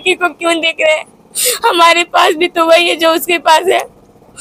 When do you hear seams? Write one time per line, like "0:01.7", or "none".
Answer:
none